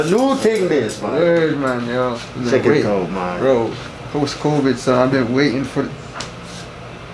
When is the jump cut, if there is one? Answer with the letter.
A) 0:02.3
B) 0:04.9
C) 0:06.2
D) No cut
A